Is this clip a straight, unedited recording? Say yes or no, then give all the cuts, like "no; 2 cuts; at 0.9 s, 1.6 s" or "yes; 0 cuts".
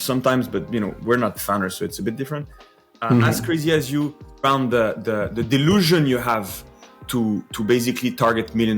no; 1 cut; at 4.4 s